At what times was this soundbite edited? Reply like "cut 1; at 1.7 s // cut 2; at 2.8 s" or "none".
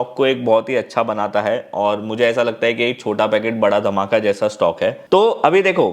none